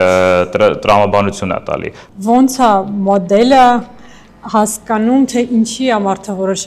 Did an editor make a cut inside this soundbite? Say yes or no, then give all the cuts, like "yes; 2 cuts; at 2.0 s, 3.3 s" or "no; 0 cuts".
yes; 1 cut; at 1.9 s